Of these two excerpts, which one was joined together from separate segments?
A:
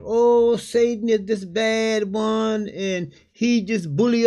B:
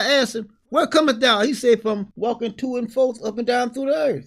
B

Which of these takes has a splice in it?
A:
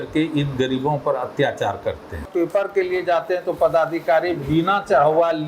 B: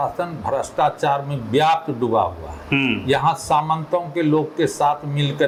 A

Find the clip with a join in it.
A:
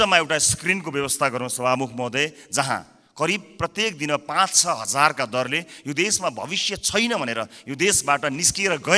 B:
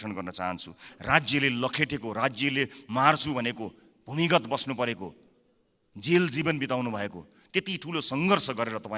B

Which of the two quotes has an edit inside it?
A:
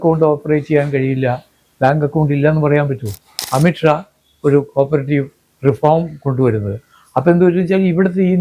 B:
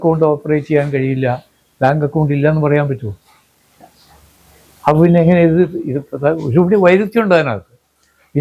A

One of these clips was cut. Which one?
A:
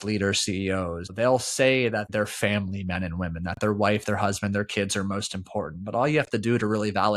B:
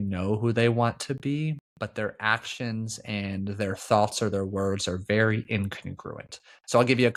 A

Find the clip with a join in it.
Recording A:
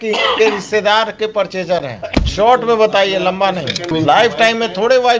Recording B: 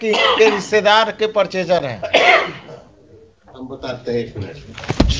A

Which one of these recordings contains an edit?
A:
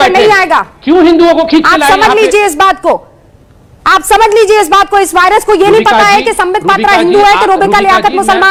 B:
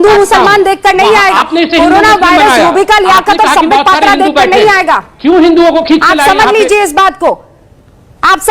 B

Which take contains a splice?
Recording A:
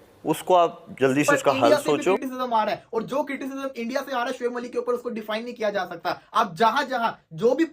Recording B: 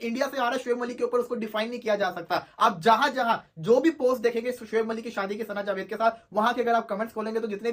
A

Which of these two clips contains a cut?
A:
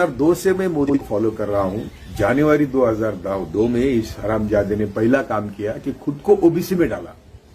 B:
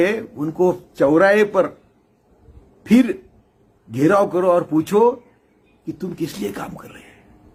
A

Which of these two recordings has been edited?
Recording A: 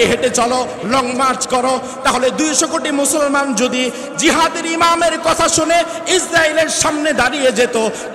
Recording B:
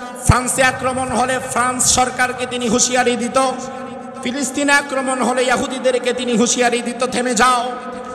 B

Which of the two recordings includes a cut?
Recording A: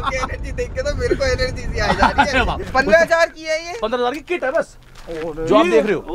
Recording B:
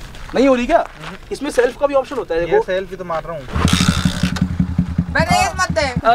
A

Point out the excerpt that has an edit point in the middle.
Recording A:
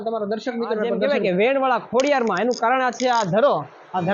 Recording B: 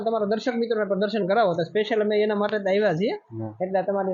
A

